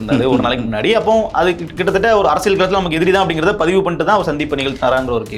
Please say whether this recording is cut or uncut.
uncut